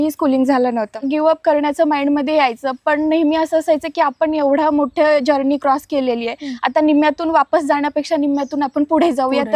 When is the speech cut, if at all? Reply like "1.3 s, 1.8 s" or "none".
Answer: 1.0 s